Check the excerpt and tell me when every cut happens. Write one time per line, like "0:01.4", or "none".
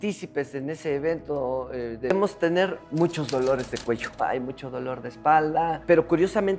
0:02.1